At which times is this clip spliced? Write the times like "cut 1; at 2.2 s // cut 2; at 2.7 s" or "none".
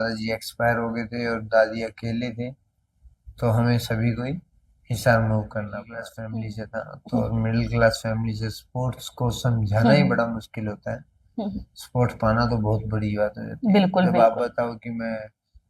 cut 1; at 6.2 s